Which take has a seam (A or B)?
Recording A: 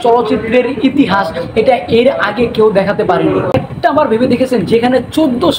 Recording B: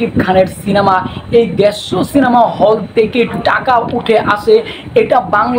A